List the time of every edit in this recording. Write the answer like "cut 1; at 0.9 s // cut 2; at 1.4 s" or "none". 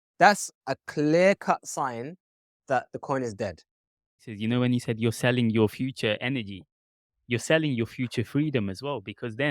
cut 1; at 4.3 s